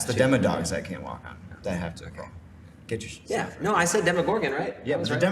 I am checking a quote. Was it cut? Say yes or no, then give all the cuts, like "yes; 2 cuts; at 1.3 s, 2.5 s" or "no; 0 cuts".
no; 0 cuts